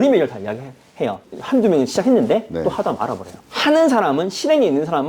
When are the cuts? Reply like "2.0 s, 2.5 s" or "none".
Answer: 1.2 s, 3.4 s

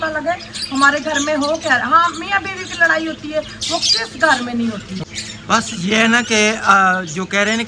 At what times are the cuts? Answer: 5.0 s

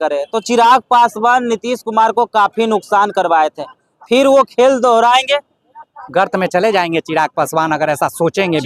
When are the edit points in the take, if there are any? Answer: none

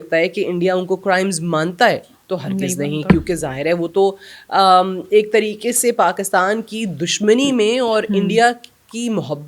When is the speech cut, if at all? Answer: none

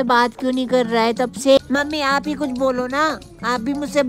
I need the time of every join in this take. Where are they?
1.6 s

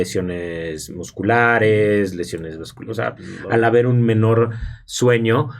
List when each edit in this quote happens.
3.3 s

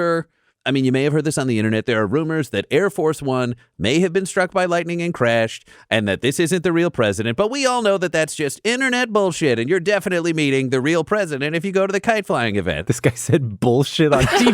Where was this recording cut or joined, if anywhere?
12.8 s

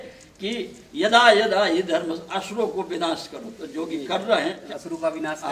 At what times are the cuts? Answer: 4.6 s

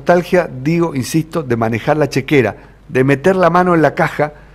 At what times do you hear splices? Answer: none

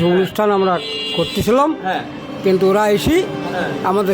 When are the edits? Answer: none

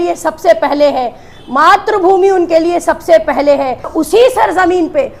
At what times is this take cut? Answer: 3.9 s

